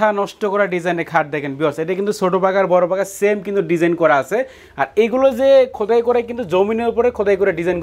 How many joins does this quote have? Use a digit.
0